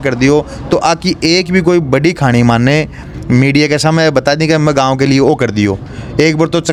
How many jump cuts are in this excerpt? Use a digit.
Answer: 0